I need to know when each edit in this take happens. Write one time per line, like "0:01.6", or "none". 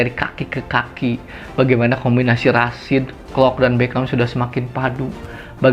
none

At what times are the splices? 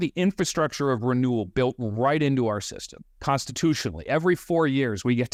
none

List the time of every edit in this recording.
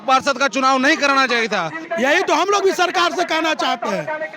0:01.8

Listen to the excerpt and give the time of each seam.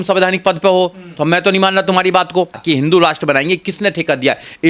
0:02.6

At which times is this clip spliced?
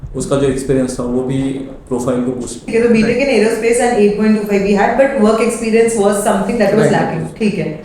0:02.6

